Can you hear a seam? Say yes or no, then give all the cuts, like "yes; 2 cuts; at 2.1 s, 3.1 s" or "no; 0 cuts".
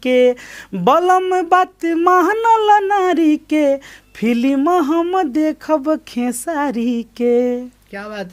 no; 0 cuts